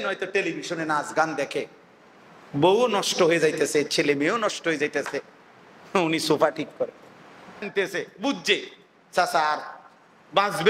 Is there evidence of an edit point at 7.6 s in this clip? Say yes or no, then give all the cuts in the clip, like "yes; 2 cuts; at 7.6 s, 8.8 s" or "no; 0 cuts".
yes; 1 cut; at 7.6 s